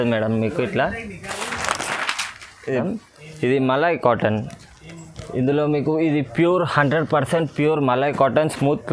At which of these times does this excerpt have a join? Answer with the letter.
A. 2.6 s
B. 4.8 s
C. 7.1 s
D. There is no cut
A